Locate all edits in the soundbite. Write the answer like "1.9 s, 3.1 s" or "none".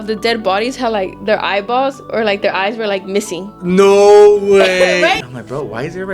5.2 s